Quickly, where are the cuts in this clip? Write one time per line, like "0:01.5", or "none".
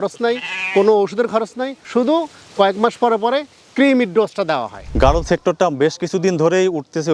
0:04.9